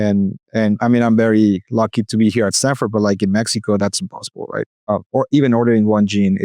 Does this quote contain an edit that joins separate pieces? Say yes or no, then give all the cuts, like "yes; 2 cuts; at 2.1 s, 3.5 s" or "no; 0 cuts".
yes; 1 cut; at 4.9 s